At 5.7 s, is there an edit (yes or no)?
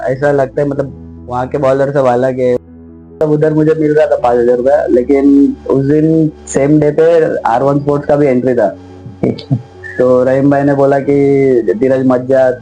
no